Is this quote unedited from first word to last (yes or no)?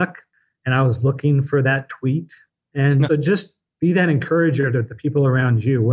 yes